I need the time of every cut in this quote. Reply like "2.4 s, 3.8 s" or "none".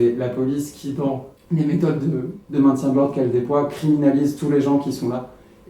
1.3 s, 2.4 s